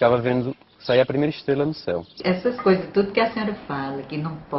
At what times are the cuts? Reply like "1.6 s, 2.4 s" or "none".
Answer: 2.1 s

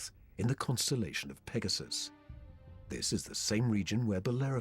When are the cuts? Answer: 3.3 s

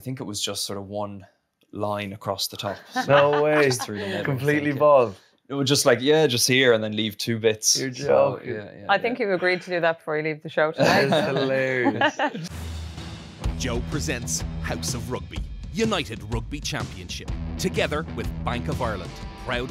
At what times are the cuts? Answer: 12.5 s

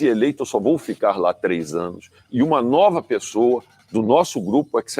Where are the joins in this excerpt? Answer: 3.8 s

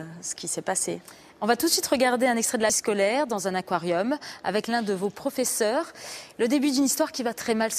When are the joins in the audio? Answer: 5.7 s

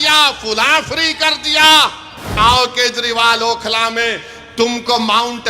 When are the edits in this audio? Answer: 2.3 s

